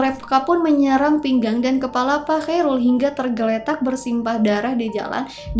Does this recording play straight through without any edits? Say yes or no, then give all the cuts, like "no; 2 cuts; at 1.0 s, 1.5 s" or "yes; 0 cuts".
yes; 0 cuts